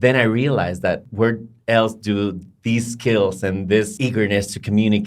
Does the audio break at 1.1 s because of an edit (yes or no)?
yes